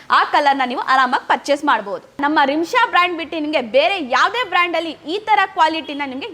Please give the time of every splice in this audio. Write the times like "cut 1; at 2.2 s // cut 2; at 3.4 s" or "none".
cut 1; at 2.2 s